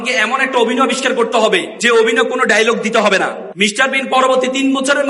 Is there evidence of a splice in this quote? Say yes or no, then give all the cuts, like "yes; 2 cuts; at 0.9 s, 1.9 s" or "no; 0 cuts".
yes; 2 cuts; at 1.7 s, 3.4 s